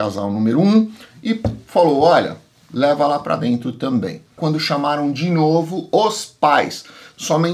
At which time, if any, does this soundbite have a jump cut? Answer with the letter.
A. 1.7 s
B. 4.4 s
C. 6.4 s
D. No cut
B